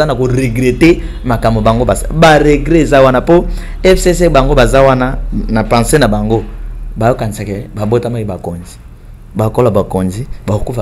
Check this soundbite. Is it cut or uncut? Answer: uncut